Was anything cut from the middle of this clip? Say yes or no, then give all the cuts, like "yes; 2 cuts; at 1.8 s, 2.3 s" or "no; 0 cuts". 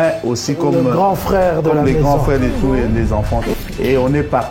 yes; 1 cut; at 3.5 s